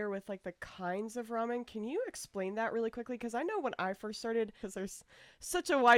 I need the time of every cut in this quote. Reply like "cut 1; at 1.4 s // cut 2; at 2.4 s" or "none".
cut 1; at 4.6 s